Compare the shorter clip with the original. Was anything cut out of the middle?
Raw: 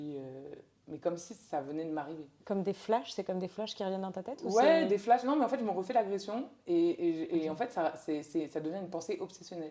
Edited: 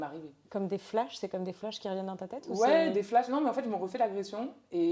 no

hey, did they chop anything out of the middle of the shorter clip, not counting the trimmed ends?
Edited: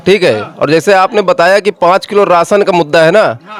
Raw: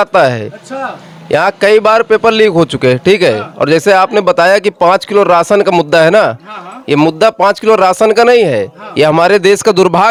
no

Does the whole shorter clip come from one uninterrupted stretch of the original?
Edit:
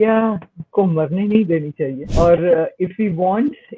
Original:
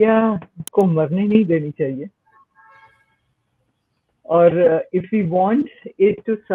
no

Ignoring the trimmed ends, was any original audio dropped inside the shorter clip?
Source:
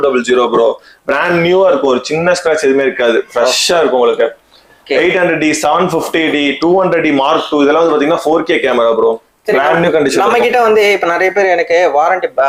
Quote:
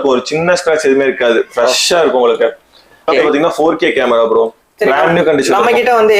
yes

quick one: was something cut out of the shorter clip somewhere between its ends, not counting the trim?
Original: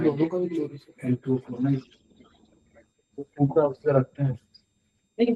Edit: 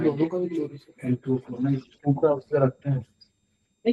yes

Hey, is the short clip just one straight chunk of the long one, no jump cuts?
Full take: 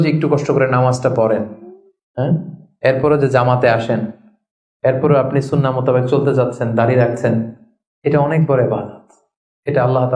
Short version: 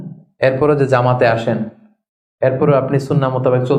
yes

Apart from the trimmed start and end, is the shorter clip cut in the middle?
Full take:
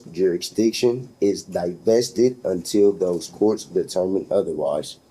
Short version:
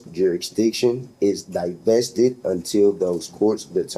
no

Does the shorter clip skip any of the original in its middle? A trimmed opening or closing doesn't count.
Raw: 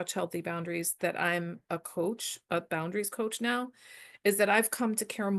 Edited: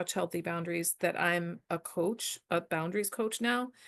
no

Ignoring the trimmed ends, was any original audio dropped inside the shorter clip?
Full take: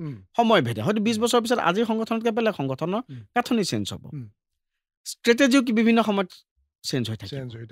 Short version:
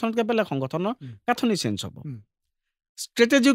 no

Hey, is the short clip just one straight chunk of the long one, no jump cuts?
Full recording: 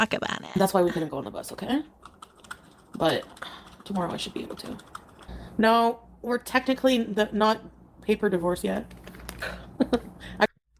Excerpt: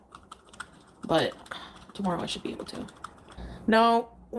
yes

